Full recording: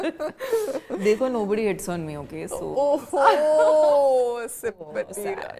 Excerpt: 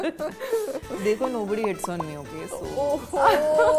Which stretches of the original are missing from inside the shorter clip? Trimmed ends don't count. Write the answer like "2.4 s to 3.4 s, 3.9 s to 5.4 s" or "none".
none